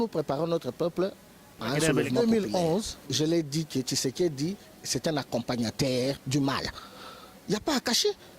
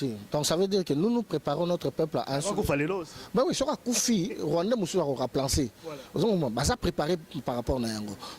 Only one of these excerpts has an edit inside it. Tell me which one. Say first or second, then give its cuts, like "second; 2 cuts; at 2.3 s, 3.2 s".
first; 1 cut; at 2.2 s